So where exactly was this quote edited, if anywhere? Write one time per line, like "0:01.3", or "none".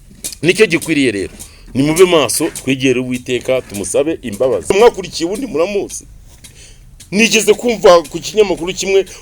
0:04.7